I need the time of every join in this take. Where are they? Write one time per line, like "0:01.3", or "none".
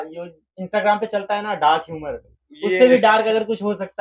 none